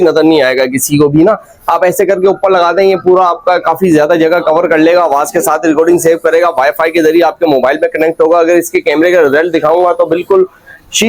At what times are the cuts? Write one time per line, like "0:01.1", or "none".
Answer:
none